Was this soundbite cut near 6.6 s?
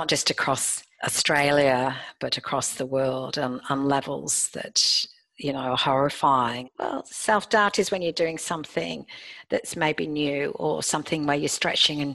yes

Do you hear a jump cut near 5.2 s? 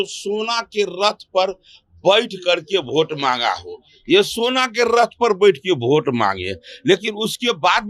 no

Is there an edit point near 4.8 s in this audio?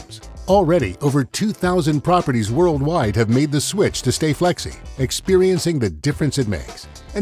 no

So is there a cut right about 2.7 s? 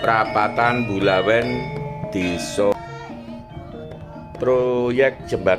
yes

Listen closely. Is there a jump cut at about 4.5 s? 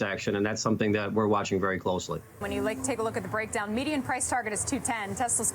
no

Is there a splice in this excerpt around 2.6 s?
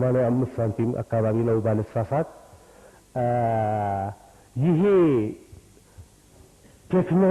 no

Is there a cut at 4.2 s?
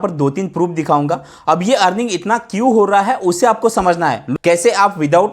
yes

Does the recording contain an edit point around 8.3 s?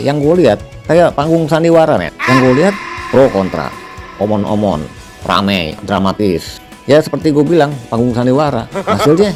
no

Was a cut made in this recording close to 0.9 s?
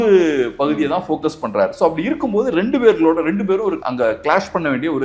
no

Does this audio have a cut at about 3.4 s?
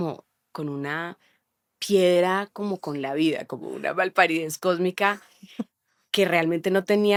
no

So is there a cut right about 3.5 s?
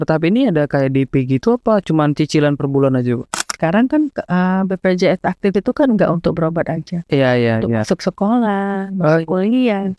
yes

